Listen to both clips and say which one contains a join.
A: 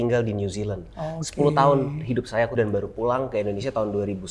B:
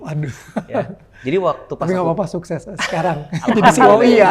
A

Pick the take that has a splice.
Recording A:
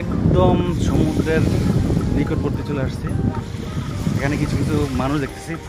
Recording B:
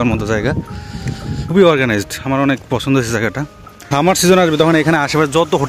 B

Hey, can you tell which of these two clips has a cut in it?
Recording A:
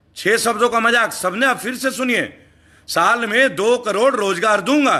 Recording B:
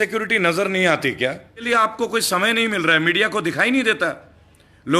B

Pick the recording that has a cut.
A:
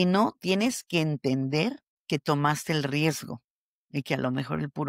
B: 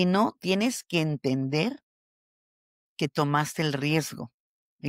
A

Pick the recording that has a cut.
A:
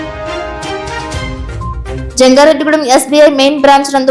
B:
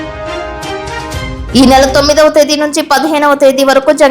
A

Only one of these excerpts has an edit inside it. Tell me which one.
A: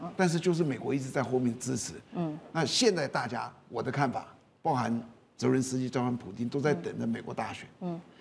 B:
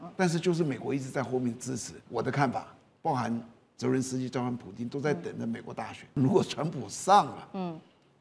B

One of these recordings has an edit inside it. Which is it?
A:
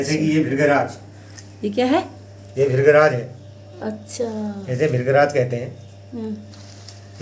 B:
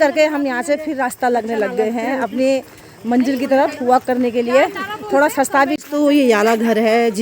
B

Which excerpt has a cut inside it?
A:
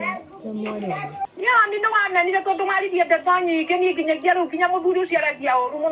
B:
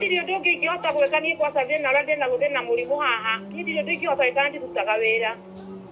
A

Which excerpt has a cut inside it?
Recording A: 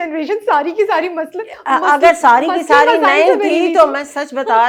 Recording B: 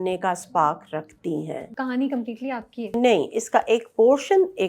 B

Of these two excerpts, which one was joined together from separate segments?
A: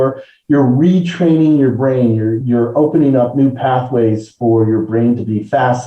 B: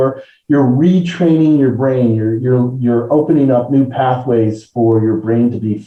A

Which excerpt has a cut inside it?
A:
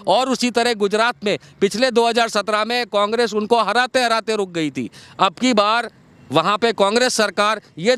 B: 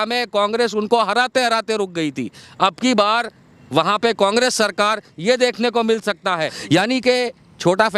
B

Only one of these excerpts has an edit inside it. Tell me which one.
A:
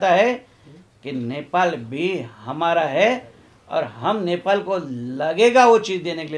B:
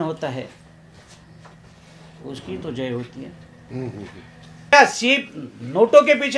B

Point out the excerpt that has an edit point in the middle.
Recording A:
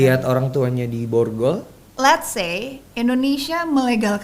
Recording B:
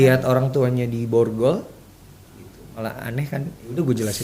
A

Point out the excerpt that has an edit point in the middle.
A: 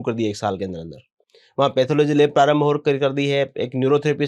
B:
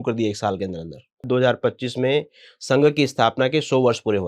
B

